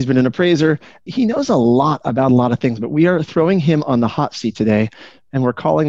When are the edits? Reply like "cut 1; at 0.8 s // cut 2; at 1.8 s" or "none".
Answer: cut 1; at 1.0 s